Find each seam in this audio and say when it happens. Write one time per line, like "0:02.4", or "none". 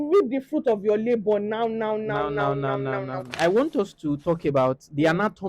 0:03.3